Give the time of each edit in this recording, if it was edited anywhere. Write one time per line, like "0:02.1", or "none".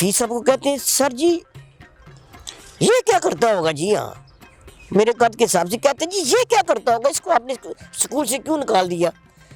none